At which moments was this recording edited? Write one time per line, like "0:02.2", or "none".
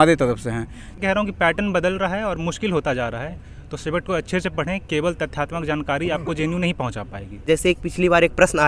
0:00.9
0:07.5

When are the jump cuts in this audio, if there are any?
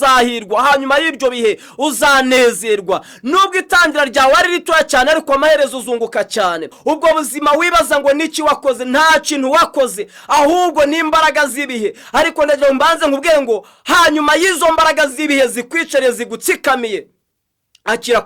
0:06.7

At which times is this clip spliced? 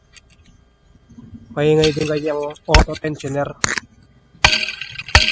none

